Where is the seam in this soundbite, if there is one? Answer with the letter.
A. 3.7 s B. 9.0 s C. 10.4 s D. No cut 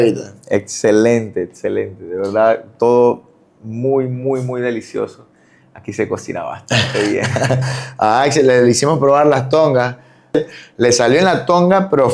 C